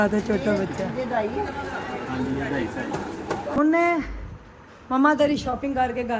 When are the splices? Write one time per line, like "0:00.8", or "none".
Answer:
0:03.5